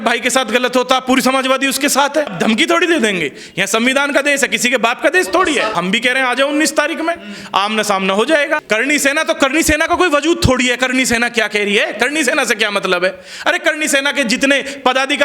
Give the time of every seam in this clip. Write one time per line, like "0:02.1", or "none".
0:02.3
0:05.7
0:08.6